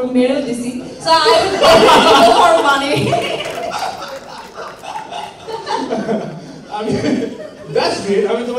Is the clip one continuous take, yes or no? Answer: yes